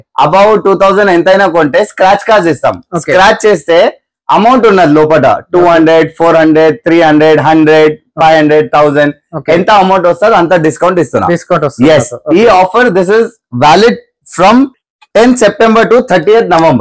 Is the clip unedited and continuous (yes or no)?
yes